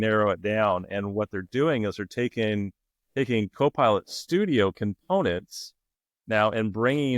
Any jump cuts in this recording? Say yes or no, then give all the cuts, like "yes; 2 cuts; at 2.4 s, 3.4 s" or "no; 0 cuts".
no; 0 cuts